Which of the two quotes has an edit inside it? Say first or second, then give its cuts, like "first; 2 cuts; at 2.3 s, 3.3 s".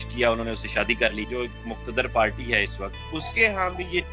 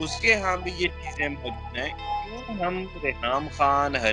first; 1 cut; at 1.2 s